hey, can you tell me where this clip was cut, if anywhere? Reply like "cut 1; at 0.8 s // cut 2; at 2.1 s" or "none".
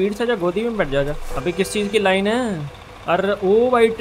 cut 1; at 1.3 s